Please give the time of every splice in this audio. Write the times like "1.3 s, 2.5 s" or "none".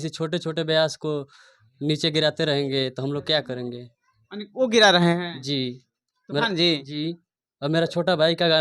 none